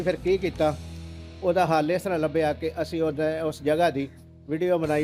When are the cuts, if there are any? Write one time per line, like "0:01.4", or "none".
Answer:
none